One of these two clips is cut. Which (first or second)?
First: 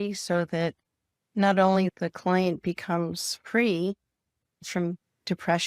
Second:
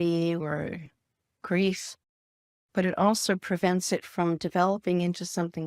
first